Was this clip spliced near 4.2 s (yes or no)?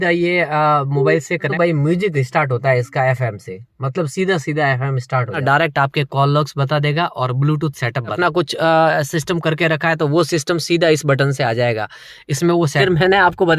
no